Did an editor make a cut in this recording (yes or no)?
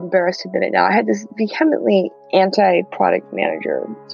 yes